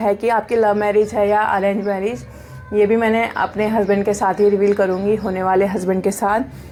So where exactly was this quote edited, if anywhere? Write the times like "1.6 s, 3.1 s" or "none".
none